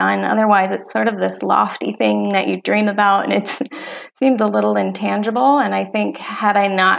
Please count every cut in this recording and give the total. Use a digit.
0